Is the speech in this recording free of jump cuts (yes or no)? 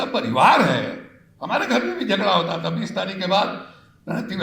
yes